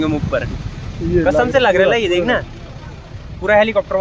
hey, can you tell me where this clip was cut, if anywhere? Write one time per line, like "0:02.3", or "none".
none

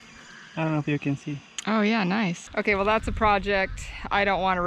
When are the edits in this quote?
0:02.4

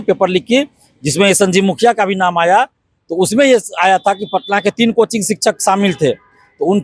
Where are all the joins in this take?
none

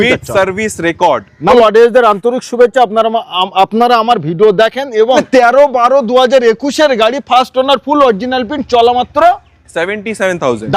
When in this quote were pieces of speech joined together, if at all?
0:01.5
0:05.2

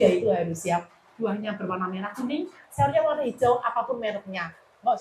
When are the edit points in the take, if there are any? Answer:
none

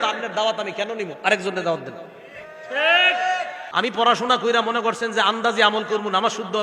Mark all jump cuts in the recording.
0:03.6

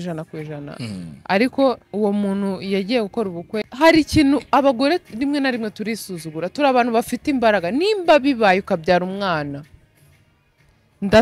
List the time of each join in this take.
0:03.7

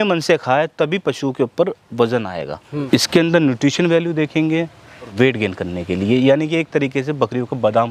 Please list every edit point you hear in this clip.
0:02.9
0:05.1

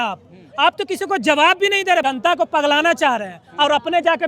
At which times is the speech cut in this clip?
0:02.0

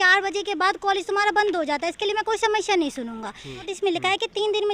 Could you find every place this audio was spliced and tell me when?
0:03.7

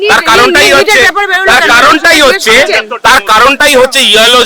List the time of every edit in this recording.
none

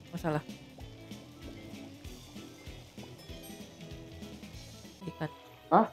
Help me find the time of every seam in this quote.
0:05.0

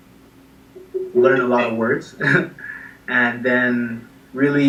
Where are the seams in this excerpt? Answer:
none

